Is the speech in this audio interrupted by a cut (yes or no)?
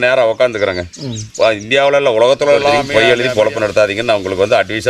yes